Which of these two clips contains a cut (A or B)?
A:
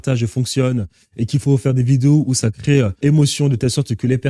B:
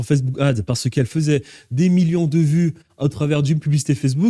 A